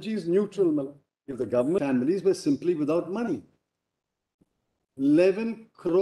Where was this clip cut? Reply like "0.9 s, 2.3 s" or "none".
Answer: 1.8 s